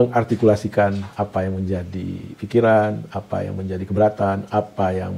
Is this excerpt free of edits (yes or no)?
yes